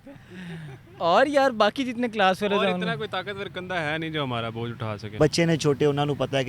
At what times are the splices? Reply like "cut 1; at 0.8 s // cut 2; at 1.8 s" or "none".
cut 1; at 5.2 s